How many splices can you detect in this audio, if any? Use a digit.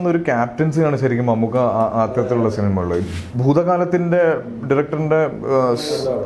1